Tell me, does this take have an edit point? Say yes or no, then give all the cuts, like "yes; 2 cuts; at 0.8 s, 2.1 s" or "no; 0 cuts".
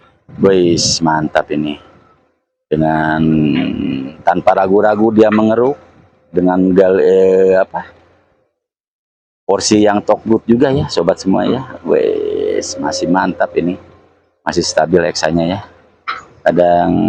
no; 0 cuts